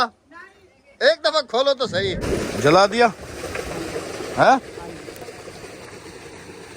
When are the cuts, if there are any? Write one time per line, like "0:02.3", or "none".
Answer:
0:02.3